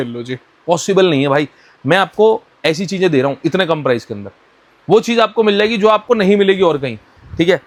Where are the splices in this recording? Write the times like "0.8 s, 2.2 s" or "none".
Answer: none